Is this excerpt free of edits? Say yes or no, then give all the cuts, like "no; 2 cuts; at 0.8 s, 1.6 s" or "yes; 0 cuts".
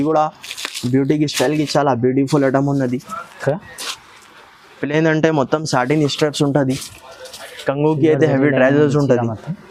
yes; 0 cuts